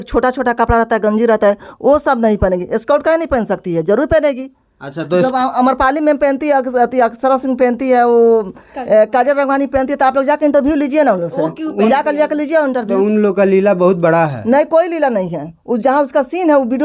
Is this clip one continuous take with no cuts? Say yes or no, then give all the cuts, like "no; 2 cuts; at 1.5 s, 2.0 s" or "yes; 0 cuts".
yes; 0 cuts